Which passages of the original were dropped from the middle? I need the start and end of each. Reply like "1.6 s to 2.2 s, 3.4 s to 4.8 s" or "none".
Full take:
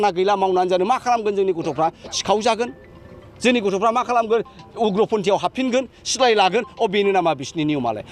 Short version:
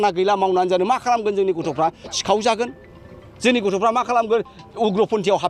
none